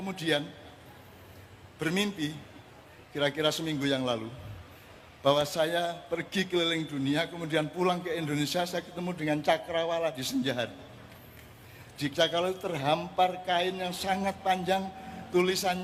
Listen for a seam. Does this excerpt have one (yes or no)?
no